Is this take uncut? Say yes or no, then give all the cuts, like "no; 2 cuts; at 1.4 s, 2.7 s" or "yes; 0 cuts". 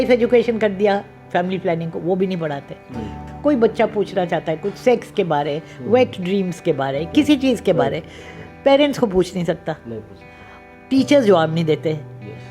no; 1 cut; at 3.1 s